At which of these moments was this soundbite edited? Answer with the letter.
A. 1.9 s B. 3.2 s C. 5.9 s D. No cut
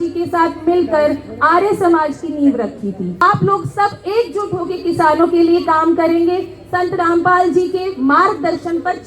B